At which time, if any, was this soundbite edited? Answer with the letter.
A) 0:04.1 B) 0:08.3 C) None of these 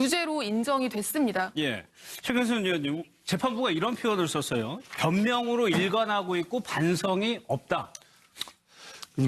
C